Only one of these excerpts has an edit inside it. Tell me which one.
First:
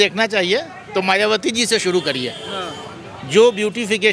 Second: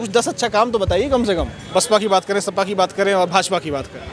second; 1 cut; at 1.6 s

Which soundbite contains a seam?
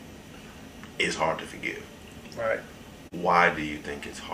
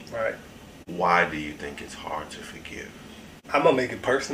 second; 1 cut; at 3.4 s

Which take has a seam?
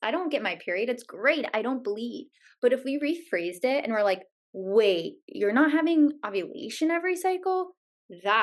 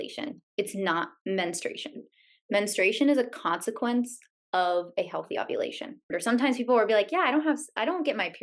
second; 1 cut; at 6.1 s

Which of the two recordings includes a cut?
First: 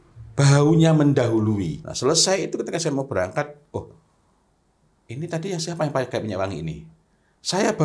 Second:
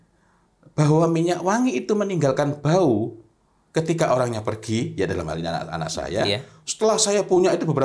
first; 1 cut; at 1.8 s

